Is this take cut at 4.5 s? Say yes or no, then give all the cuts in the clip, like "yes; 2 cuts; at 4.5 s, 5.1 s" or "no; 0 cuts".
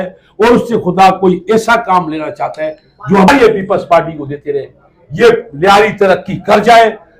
no; 1 cut; at 3.3 s